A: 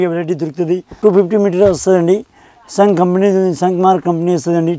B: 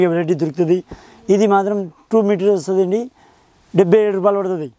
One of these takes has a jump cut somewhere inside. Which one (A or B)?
A